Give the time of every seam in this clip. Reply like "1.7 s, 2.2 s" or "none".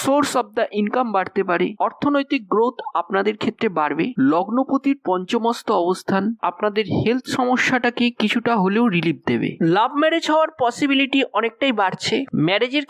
4.1 s, 9.5 s